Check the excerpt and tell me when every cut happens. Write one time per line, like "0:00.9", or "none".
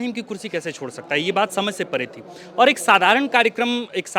none

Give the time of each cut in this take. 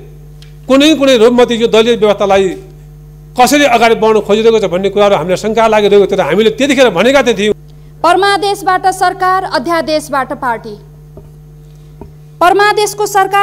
0:07.5

